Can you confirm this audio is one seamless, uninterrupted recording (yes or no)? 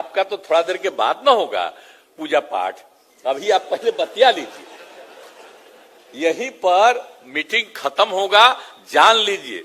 yes